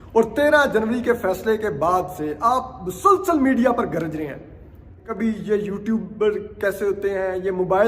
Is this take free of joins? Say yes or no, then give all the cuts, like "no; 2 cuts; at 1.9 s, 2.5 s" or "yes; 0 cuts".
no; 1 cut; at 5.1 s